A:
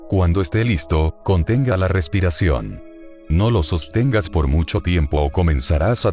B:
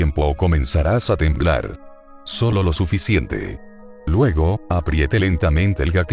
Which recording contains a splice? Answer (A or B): B